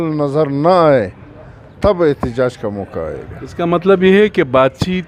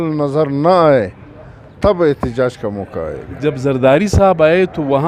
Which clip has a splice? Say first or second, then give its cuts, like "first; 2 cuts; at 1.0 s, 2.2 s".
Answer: second; 1 cut; at 3.3 s